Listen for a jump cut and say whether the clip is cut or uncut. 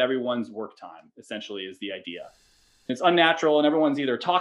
cut